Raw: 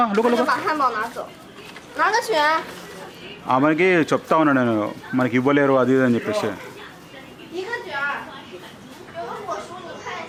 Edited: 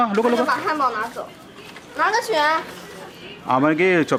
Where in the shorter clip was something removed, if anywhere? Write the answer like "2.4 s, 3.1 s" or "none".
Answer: none